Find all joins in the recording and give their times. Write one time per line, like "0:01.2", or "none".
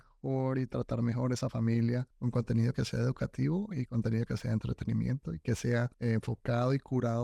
0:02.1
0:05.9

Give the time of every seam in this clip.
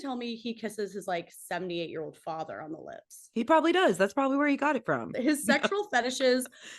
0:05.1

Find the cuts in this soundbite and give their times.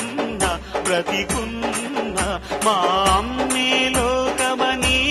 none

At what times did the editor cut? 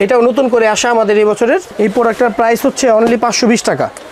none

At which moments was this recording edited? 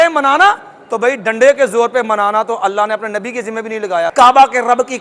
0:04.1

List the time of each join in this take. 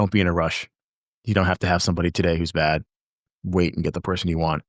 0:03.2

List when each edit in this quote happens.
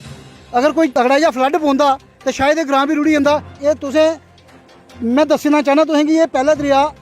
0:00.9

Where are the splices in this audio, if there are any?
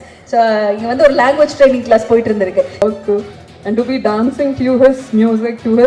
0:02.8

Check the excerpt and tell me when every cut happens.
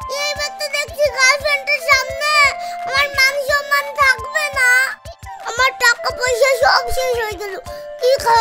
none

